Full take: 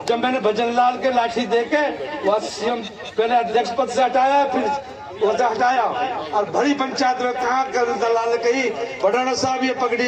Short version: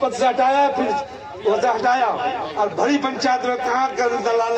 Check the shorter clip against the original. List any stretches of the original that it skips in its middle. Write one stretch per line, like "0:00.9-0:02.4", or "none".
none